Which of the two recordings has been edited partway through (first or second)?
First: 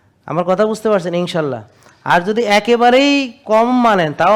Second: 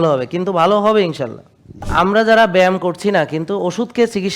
second